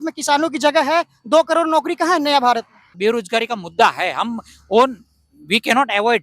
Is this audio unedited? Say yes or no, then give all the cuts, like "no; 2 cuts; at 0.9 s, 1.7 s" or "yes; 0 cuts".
no; 1 cut; at 3.0 s